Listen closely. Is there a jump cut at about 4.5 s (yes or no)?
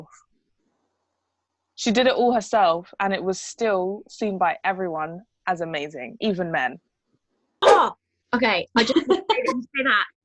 no